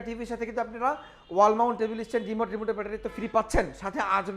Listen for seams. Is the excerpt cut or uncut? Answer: uncut